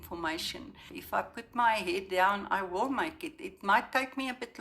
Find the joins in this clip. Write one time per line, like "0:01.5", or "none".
0:00.9